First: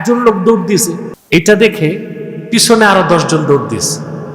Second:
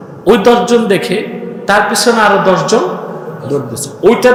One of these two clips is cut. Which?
first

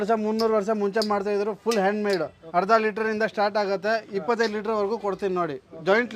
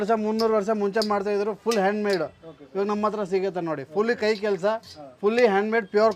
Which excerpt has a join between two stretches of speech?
first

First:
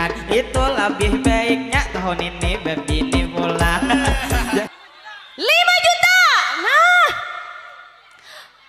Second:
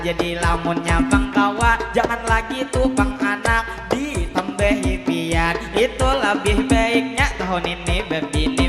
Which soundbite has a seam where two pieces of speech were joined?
first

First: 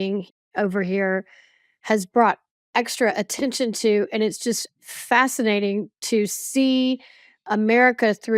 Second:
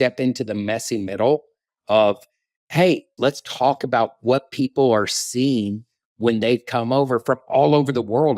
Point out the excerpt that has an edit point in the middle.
second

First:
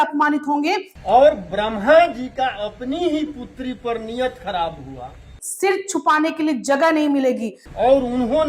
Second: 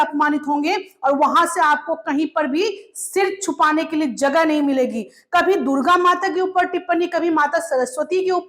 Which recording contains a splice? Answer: first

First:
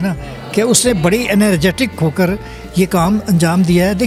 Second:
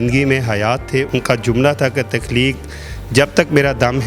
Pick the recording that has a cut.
second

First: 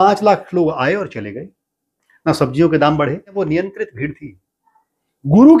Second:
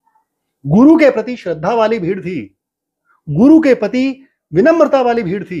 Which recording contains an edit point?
first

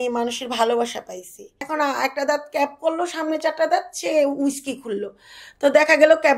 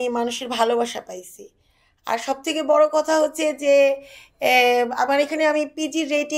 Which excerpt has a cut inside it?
first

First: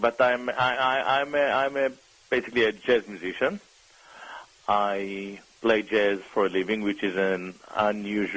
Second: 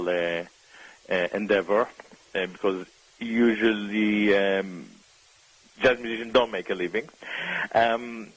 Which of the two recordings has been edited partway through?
second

